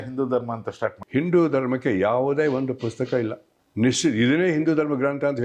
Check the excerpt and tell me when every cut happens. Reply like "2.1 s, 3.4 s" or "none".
1.0 s